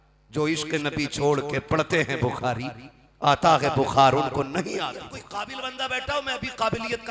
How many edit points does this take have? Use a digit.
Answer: 1